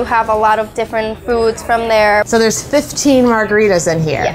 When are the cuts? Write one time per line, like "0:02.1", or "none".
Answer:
0:02.3